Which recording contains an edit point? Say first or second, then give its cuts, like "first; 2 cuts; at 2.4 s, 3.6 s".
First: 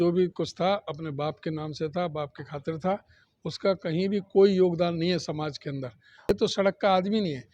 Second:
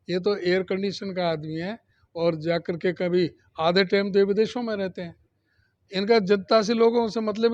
first; 1 cut; at 6.3 s